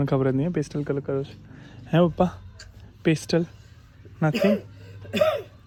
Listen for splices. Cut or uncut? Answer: uncut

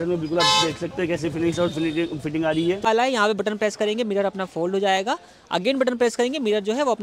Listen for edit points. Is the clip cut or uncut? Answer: cut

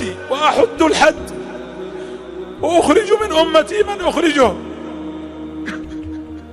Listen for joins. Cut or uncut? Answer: uncut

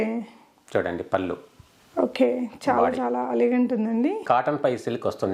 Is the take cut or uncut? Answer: cut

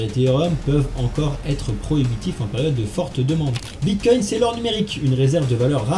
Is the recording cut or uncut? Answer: cut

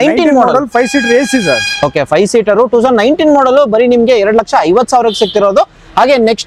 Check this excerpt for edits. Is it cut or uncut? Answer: uncut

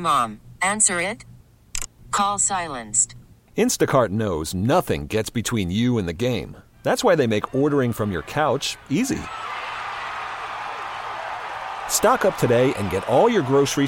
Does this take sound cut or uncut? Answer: uncut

